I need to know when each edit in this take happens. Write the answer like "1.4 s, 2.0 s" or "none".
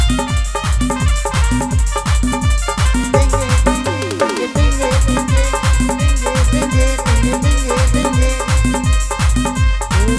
none